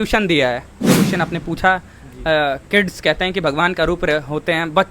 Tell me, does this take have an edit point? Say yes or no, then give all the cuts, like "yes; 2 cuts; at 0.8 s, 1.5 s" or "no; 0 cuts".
yes; 1 cut; at 1.0 s